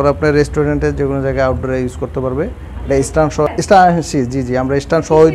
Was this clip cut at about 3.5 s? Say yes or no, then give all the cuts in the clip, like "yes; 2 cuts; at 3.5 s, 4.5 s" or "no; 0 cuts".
yes; 1 cut; at 3.5 s